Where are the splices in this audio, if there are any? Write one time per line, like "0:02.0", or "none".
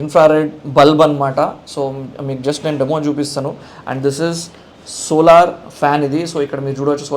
none